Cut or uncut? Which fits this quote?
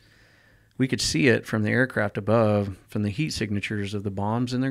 uncut